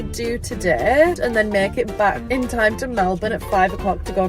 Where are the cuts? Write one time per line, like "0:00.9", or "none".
0:01.2
0:02.2